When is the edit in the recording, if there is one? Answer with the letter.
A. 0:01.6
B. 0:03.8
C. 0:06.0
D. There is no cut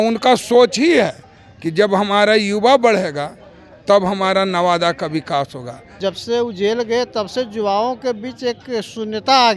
C